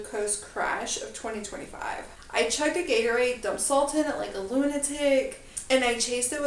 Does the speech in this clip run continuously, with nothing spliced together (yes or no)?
no